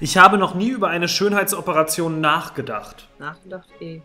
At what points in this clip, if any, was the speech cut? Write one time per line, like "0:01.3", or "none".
0:03.0